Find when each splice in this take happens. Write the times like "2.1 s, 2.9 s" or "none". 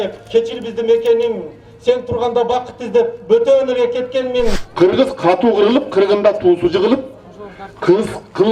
4.6 s